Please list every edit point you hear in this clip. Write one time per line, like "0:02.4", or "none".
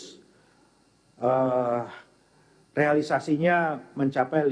none